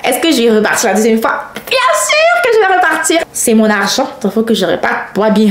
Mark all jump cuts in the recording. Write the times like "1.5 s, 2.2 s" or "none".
3.3 s